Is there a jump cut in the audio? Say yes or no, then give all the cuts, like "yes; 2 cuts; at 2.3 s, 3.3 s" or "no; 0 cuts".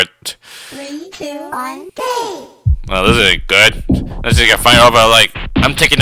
no; 0 cuts